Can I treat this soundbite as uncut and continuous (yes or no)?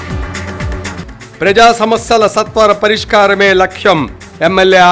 yes